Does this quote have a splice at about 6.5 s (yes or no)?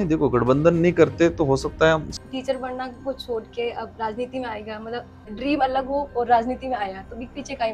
no